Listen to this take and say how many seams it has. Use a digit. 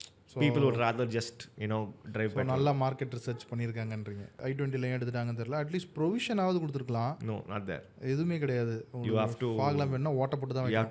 1